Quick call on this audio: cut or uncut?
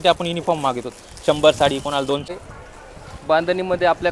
cut